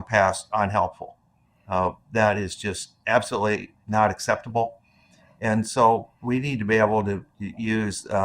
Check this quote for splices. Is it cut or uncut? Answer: uncut